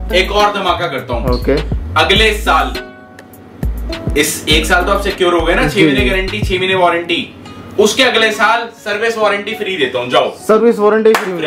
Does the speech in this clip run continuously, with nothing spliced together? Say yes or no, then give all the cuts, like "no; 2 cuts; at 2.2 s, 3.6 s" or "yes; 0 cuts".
yes; 0 cuts